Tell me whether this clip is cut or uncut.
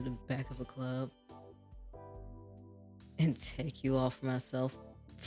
cut